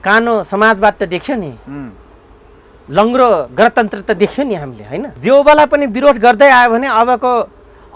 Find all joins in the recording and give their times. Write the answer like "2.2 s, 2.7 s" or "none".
5.1 s